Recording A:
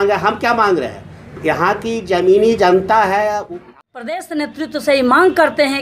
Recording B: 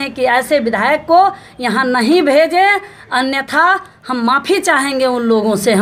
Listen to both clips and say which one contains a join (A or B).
A